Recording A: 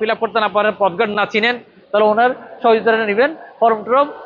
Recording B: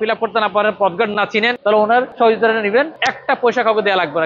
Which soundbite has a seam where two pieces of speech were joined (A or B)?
B